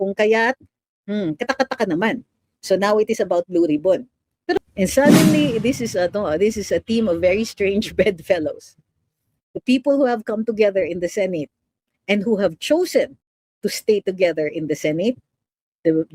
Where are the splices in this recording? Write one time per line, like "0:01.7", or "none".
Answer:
0:04.6